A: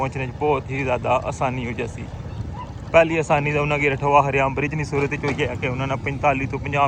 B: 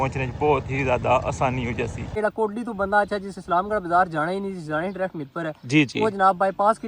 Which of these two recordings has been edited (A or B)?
B